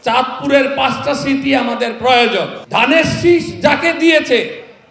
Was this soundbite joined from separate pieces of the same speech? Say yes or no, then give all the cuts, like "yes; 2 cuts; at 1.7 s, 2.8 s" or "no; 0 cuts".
yes; 1 cut; at 2.6 s